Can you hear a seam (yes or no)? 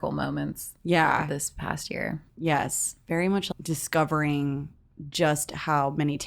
yes